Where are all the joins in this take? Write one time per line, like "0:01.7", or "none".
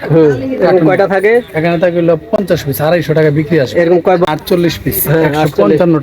0:04.3